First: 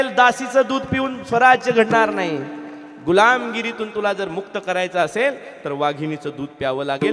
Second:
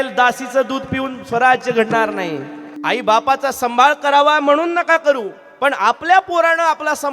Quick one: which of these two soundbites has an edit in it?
second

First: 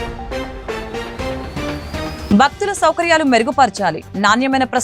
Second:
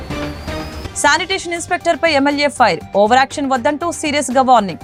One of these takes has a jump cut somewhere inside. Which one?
first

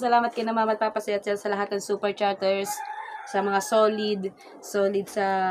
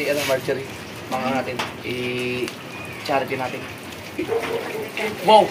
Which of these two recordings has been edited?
second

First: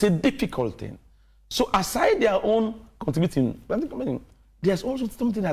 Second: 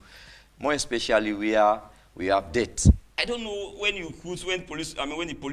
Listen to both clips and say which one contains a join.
second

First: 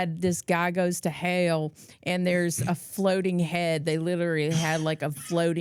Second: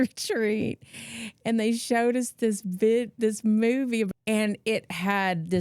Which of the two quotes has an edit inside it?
second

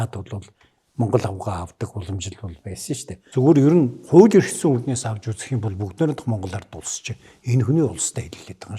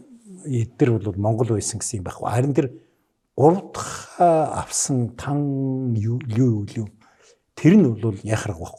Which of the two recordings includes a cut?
first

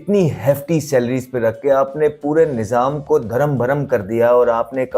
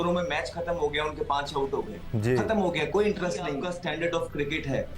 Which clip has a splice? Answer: second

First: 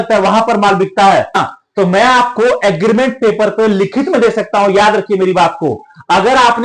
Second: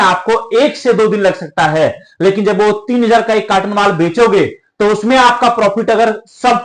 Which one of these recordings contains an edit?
first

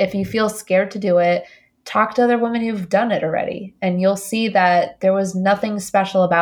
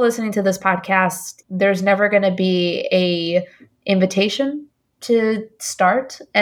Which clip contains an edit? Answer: second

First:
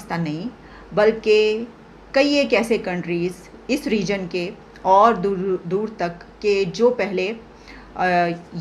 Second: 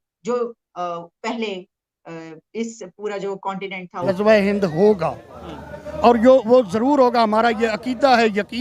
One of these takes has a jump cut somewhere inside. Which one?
second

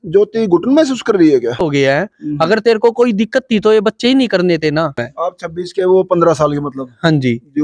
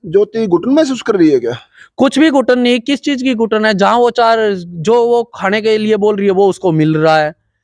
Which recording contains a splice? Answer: first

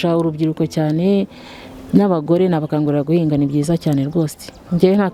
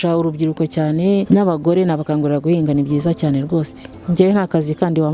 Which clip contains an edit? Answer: second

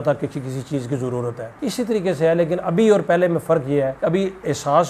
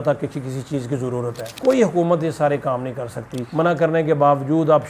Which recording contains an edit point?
second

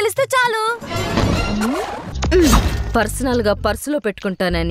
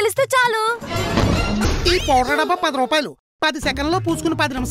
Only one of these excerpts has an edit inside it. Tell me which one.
second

